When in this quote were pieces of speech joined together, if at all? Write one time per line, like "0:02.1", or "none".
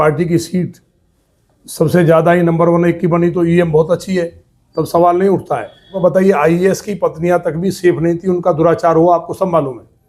0:05.9